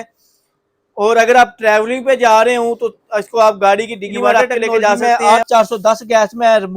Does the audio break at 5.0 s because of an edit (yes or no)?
yes